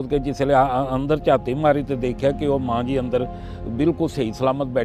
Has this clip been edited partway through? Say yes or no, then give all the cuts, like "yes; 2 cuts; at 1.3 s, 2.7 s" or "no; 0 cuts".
no; 0 cuts